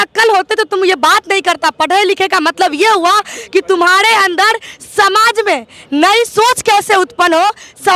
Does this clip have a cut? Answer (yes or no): no